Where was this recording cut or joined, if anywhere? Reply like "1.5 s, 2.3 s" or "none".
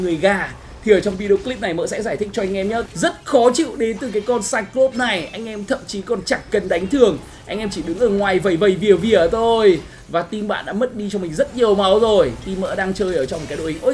2.9 s